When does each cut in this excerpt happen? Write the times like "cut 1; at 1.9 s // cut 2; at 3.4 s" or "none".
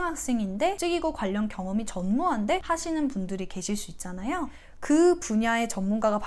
cut 1; at 0.8 s // cut 2; at 2.6 s // cut 3; at 4.6 s